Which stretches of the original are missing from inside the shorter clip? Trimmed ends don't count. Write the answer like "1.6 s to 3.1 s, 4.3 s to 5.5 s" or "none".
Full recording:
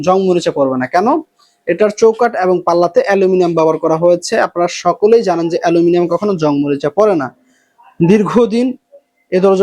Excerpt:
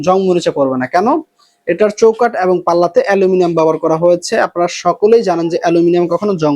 none